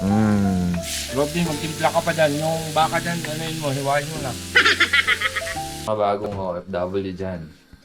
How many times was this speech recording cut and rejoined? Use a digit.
1